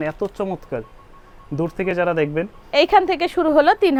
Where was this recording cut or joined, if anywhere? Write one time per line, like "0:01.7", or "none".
none